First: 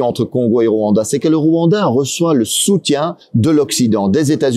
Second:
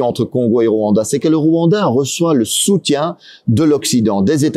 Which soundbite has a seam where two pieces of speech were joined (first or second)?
first